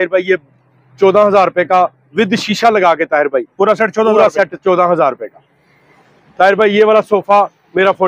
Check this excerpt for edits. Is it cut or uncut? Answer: uncut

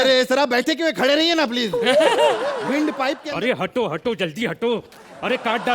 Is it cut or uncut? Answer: cut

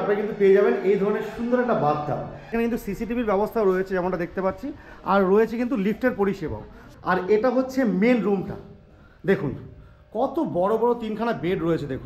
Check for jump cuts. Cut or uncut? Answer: cut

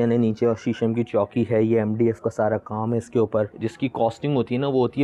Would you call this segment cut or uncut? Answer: cut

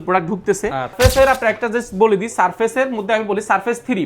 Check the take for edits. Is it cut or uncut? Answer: cut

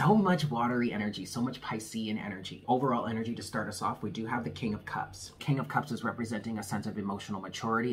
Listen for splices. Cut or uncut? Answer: cut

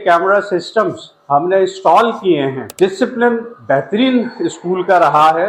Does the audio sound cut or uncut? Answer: uncut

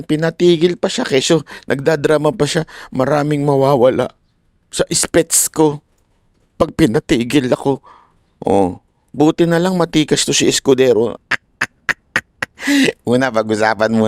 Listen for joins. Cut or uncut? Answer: cut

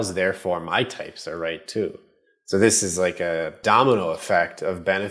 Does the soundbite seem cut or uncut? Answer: cut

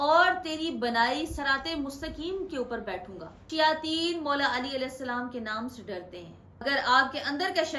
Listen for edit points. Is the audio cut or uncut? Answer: cut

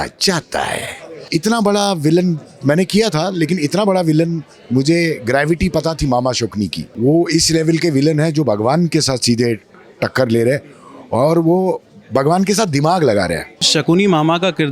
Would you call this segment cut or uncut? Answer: cut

